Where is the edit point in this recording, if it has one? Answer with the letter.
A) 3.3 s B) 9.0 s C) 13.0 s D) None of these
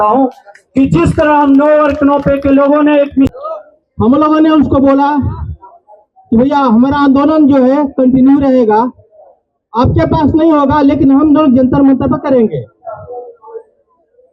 A